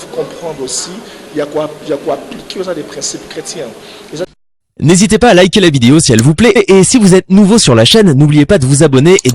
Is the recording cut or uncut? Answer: cut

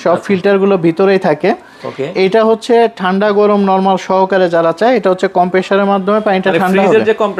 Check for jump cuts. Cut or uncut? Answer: uncut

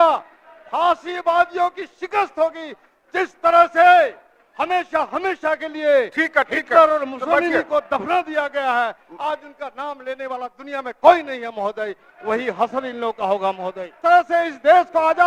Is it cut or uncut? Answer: cut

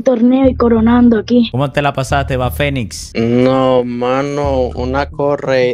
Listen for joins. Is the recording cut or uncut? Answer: uncut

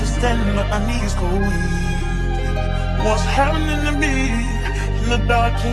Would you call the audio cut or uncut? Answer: uncut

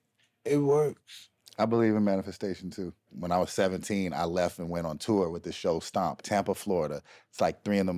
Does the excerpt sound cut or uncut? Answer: cut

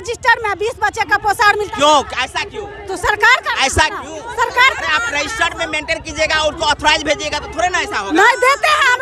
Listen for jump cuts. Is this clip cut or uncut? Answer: uncut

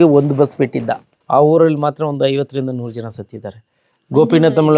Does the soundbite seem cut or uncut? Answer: cut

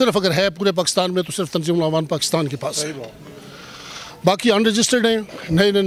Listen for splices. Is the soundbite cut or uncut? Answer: uncut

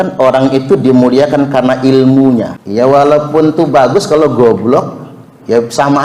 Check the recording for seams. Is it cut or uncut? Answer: cut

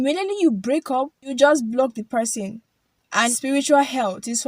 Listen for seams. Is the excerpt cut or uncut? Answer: cut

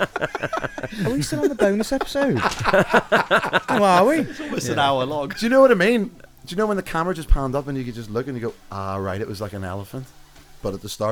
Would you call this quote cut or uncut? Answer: uncut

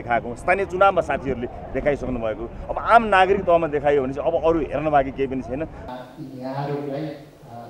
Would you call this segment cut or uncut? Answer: cut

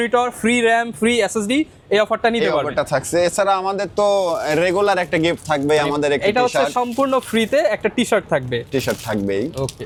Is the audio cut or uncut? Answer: uncut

